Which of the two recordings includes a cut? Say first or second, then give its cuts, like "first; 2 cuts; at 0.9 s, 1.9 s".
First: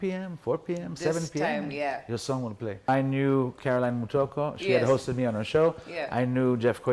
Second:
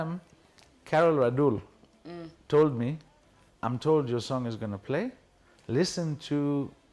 first; 1 cut; at 2.9 s